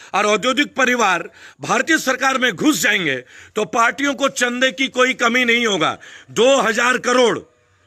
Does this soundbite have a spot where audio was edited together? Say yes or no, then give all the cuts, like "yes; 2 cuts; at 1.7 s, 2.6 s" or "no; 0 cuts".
no; 0 cuts